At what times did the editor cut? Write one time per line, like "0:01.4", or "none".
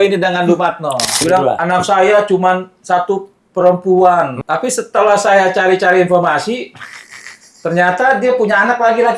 0:01.2
0:04.4